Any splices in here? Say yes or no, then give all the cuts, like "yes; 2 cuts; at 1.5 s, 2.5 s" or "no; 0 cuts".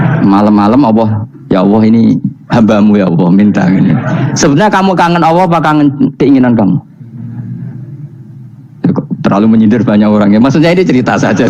no; 0 cuts